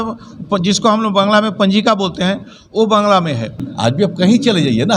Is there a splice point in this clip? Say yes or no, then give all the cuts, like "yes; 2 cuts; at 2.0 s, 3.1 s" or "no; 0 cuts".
yes; 1 cut; at 3.6 s